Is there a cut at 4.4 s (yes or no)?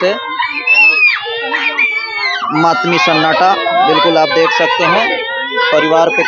no